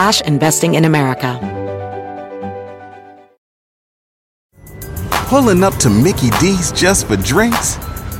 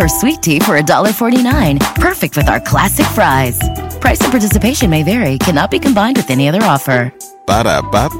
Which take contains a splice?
first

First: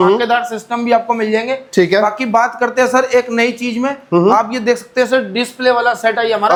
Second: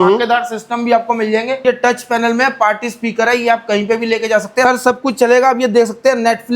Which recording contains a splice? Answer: second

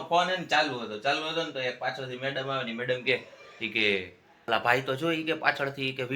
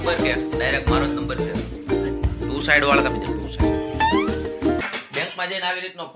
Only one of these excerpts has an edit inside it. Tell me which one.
second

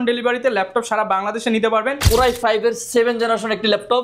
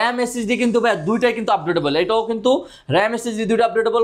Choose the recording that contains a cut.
first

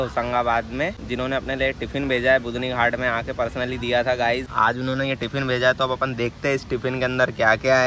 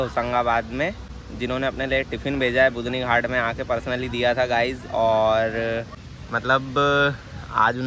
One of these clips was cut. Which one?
first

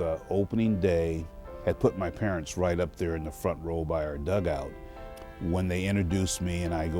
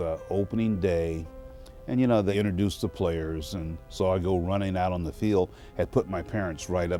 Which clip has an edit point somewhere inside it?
first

